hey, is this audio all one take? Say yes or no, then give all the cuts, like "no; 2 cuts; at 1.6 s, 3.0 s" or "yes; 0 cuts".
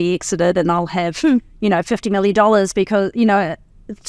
yes; 0 cuts